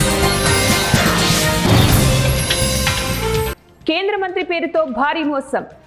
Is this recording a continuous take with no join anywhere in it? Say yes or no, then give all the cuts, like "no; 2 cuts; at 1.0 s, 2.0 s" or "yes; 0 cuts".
no; 1 cut; at 3.5 s